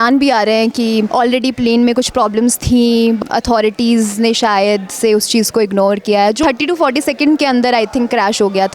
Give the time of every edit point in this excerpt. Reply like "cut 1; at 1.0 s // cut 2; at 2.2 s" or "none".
cut 1; at 1.1 s // cut 2; at 3.2 s // cut 3; at 6.4 s